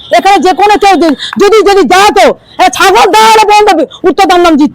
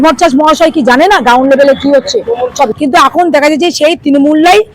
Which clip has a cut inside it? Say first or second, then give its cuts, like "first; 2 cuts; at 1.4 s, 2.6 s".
second; 1 cut; at 2.7 s